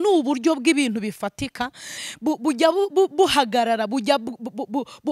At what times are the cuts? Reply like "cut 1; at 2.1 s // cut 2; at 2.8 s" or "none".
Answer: cut 1; at 2.0 s